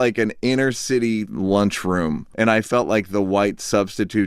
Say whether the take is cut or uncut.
cut